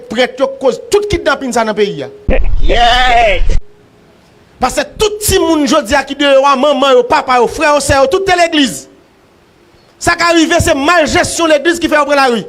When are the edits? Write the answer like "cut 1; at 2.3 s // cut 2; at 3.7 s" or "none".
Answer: cut 1; at 2.1 s // cut 2; at 4.2 s